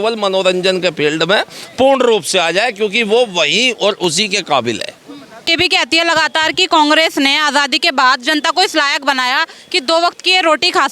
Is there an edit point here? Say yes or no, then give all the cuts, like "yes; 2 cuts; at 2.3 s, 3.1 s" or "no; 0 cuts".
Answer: yes; 1 cut; at 5.5 s